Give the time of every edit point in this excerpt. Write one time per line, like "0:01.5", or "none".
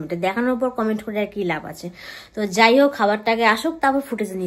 none